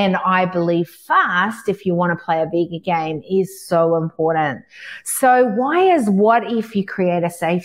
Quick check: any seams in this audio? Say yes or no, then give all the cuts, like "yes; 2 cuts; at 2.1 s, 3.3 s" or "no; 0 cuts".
no; 0 cuts